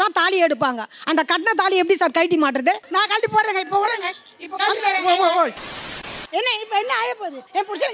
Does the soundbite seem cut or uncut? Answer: cut